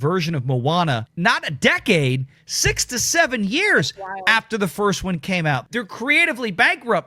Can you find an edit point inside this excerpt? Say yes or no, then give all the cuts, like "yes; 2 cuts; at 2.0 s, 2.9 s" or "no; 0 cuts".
yes; 2 cuts; at 1.1 s, 5.6 s